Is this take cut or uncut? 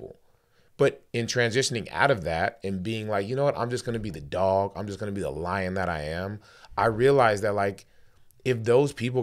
uncut